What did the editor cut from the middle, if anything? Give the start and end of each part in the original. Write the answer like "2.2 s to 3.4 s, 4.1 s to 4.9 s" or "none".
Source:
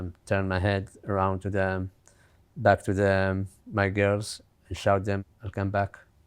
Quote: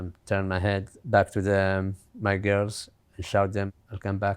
0.9 s to 2.5 s